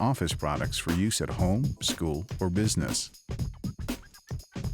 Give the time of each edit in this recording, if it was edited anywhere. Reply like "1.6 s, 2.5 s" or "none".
2.9 s